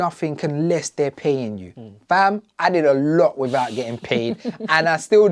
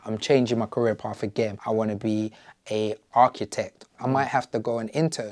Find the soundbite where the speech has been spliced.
second; 2 cuts; at 1.6 s, 3.9 s

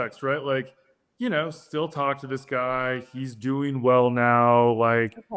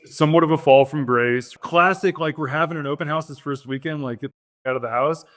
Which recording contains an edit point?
second; 1 cut; at 1.5 s

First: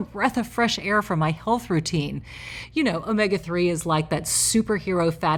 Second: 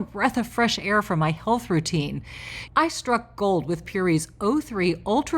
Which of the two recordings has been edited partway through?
second; 1 cut; at 2.6 s

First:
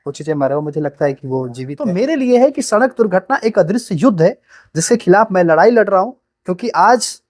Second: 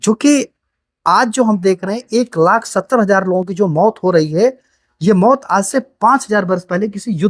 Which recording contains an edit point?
first; 1 cut; at 1.8 s

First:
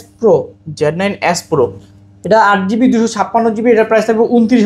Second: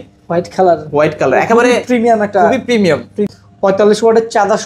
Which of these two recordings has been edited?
second; 1 cut; at 3.3 s

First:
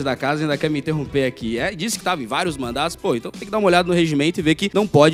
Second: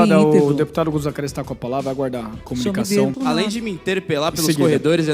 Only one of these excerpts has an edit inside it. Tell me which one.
second; 1 cut; at 3.1 s

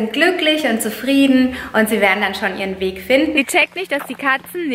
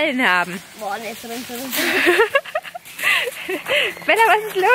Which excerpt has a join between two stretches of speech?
first; 1 cut; at 3.4 s

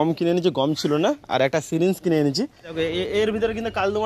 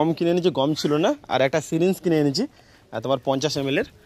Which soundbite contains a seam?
first; 1 cut; at 2.7 s

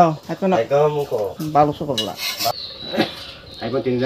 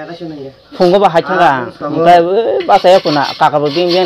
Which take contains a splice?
first; 1 cut; at 2.5 s

